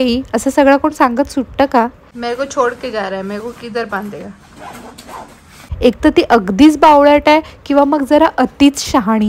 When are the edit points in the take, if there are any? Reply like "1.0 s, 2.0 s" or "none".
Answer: 2.1 s, 5.7 s